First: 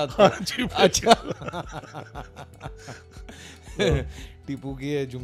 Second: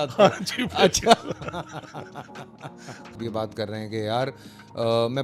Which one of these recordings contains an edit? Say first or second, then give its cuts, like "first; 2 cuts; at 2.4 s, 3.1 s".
second; 1 cut; at 3.2 s